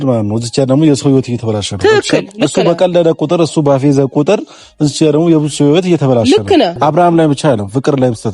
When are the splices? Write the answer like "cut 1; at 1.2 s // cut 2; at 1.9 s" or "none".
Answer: cut 1; at 6.7 s